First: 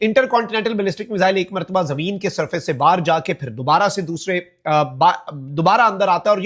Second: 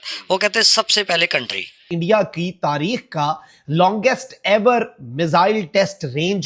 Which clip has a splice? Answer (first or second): second